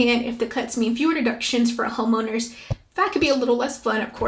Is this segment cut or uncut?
uncut